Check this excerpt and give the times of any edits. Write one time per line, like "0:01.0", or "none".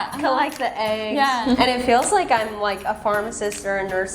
0:01.4